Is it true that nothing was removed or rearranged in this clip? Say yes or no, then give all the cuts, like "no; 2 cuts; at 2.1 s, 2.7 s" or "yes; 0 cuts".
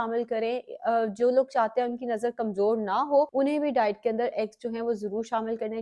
no; 1 cut; at 3.3 s